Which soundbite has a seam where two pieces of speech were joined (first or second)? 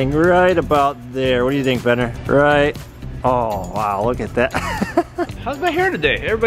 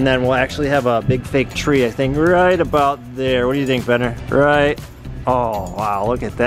first